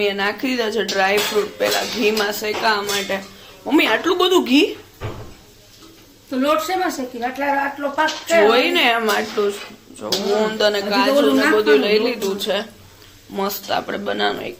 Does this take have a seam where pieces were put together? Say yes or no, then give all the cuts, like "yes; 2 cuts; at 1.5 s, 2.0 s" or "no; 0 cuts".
no; 0 cuts